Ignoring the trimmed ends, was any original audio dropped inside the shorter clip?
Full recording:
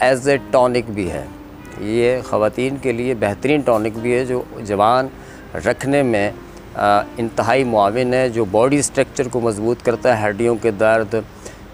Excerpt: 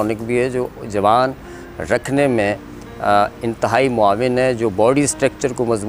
no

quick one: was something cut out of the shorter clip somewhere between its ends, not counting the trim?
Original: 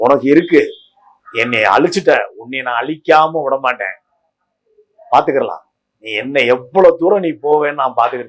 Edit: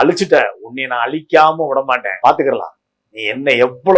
yes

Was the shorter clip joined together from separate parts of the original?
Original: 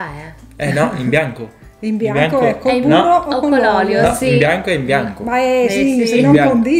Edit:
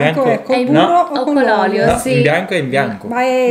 no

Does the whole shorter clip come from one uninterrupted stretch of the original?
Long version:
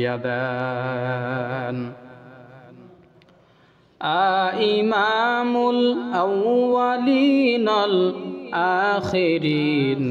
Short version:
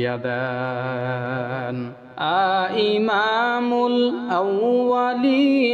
no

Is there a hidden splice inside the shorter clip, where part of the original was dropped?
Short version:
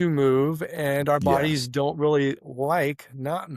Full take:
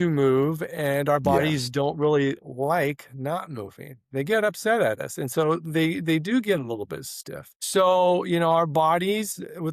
no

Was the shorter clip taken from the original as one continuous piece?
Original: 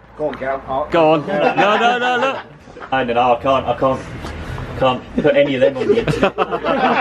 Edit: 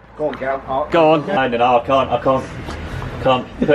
no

